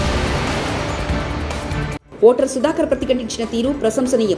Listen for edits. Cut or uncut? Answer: uncut